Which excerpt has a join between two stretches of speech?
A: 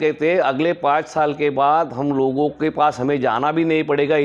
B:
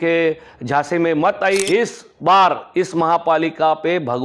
B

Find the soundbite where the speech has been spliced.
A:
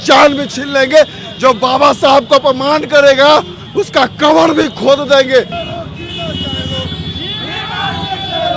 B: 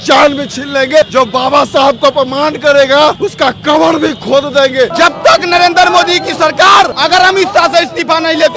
B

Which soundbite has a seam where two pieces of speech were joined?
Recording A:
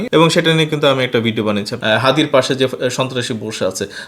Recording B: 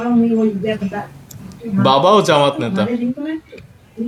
A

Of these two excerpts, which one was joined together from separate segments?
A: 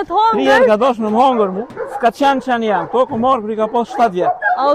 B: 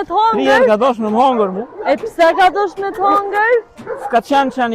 A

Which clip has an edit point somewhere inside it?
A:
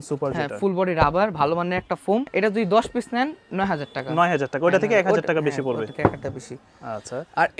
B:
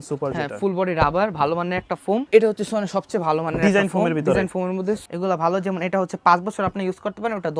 B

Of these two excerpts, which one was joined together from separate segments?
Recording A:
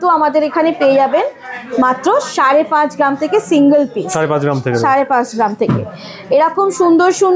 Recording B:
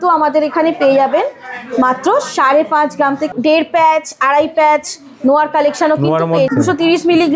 B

